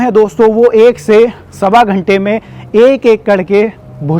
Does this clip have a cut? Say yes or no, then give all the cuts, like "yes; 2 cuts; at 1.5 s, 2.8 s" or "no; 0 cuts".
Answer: no; 0 cuts